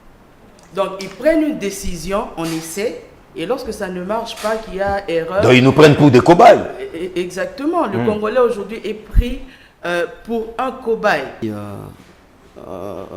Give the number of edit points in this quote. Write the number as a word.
one